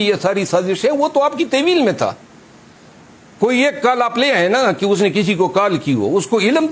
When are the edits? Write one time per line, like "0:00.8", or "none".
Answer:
none